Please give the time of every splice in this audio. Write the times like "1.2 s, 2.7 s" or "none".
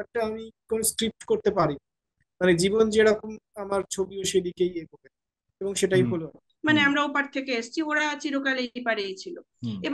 6.4 s